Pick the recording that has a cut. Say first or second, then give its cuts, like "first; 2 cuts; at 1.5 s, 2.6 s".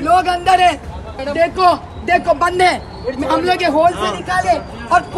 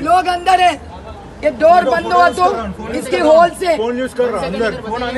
first; 1 cut; at 1.2 s